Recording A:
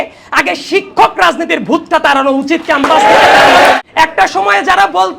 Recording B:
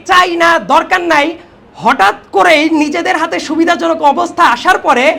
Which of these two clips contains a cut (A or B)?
A